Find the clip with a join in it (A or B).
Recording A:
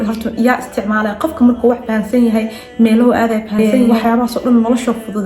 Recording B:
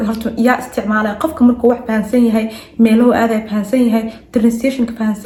A